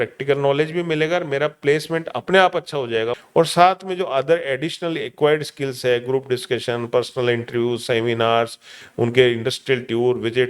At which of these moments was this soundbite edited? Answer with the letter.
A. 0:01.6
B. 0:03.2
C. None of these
B